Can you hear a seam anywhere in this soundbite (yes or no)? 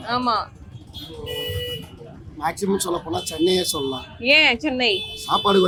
no